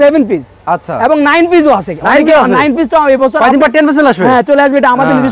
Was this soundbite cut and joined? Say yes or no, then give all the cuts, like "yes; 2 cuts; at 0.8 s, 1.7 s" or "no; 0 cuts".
no; 0 cuts